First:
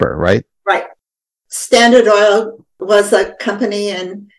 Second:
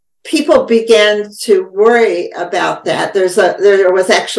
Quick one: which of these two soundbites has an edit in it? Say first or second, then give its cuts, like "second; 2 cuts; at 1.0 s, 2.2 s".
first; 2 cuts; at 1.1 s, 2.8 s